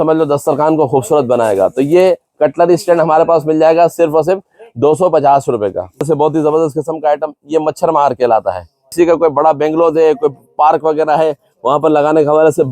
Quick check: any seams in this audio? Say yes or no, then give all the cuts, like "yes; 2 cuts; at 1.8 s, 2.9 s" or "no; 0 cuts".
yes; 2 cuts; at 6.0 s, 8.9 s